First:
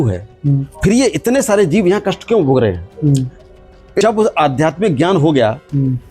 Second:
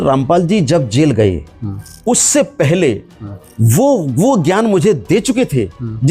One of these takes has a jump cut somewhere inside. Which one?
first; 1 cut; at 4.0 s

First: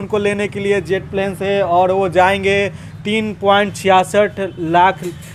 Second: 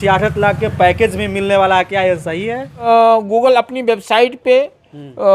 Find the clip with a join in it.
second; 1 cut; at 2.9 s

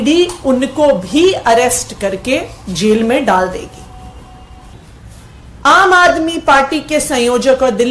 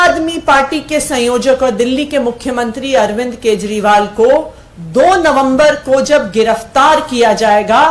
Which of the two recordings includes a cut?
first; 1 cut; at 4.7 s

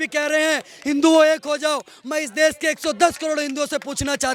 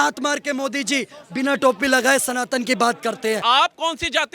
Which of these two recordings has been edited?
second; 1 cut; at 3.4 s

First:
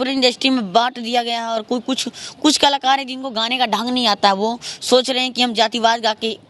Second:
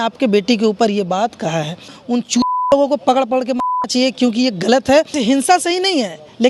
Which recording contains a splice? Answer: second; 2 cuts; at 2.0 s, 5.2 s

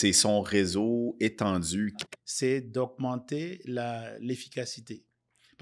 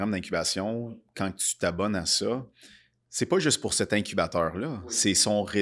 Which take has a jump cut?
first; 1 cut; at 2.0 s

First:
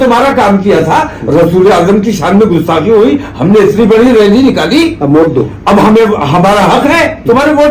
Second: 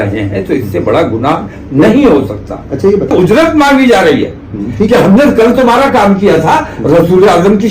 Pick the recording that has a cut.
second; 1 cut; at 3.1 s

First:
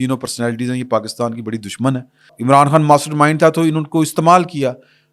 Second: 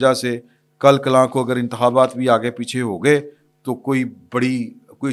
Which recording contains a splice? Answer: first; 1 cut; at 2.3 s

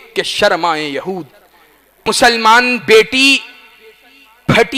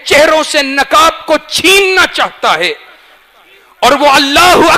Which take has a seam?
first; 1 cut; at 2.0 s

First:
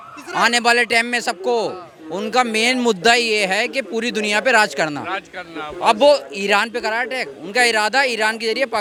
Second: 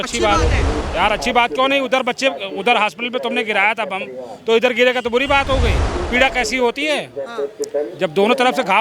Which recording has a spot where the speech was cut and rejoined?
second; 1 cut; at 5.9 s

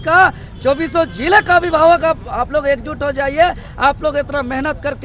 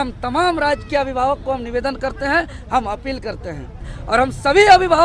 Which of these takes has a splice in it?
second; 1 cut; at 4.0 s

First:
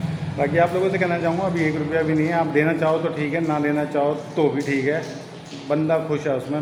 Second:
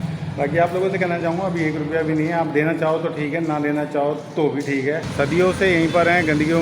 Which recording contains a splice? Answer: second; 1 cut; at 5.1 s

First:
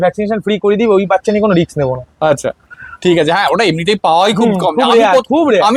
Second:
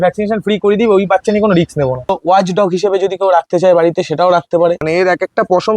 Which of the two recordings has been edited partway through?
second; 2 cuts; at 2.1 s, 4.8 s

